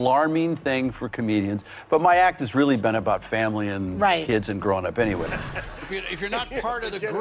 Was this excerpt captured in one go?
no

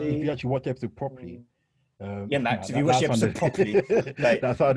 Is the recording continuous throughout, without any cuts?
yes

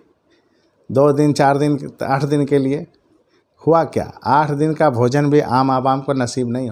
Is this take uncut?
yes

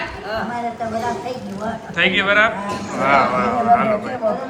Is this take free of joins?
yes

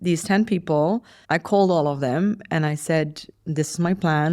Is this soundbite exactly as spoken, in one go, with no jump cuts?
no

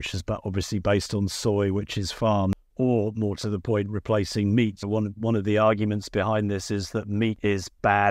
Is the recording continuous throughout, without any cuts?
no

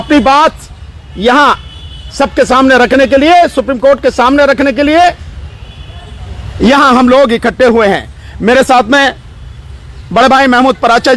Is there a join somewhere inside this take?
no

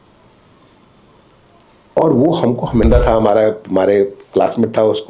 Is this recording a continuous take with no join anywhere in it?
no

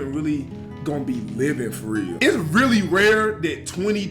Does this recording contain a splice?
yes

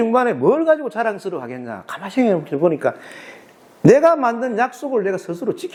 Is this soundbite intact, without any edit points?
yes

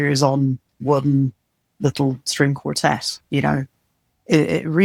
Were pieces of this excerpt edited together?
no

